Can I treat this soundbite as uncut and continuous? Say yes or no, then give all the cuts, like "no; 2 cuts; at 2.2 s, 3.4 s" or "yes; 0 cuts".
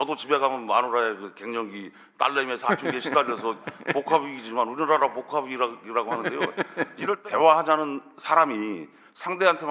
no; 1 cut; at 7.2 s